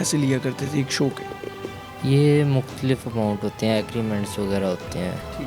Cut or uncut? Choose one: uncut